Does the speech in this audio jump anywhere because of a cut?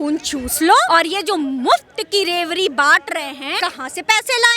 yes; 2 cuts; at 0.9 s, 3.6 s

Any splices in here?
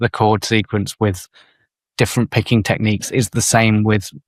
no; 0 cuts

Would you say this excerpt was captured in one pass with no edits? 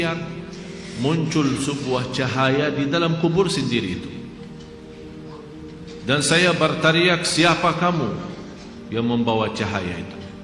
yes; 0 cuts

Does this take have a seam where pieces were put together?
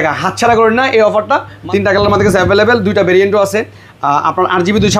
yes; 1 cut; at 1.5 s

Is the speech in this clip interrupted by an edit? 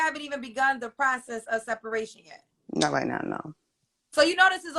yes; 1 cut; at 2.2 s

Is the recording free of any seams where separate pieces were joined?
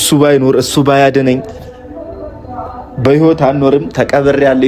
yes; 0 cuts

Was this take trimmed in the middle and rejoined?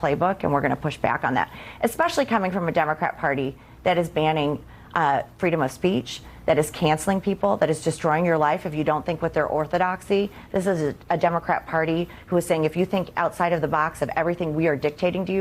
yes; 1 cut; at 1.6 s

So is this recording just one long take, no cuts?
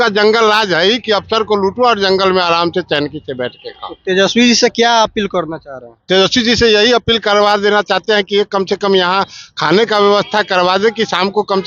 yes; 0 cuts

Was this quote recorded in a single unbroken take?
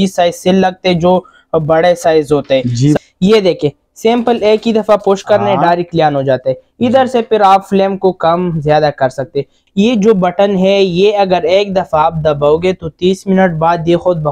no; 2 cuts; at 3.0 s, 9.6 s

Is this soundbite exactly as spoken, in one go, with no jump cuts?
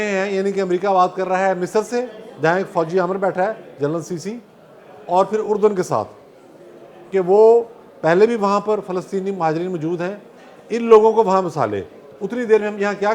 yes; 0 cuts

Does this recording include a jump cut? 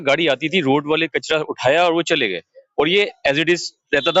no; 0 cuts

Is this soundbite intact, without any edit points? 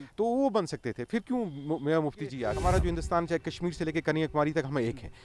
no; 1 cut; at 2.5 s

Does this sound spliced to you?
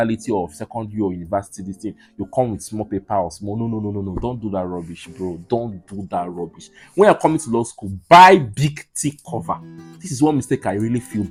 no; 0 cuts

